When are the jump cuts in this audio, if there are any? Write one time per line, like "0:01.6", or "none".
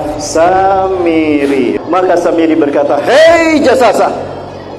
0:01.8